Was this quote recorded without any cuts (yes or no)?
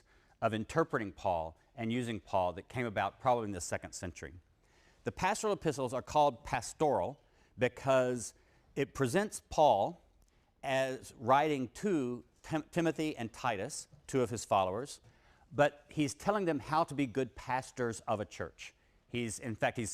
yes